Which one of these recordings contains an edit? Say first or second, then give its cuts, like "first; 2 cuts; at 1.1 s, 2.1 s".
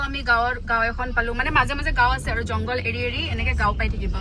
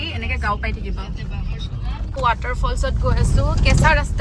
second; 1 cut; at 2.0 s